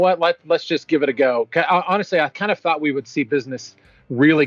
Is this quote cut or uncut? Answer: cut